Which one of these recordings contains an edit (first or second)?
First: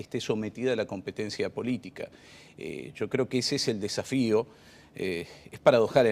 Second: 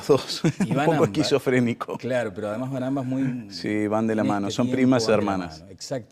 first